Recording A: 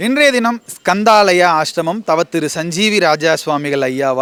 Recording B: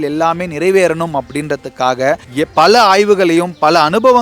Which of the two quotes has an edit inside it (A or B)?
B